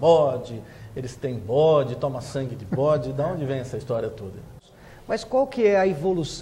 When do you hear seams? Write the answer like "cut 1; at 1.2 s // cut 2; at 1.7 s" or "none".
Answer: cut 1; at 4.6 s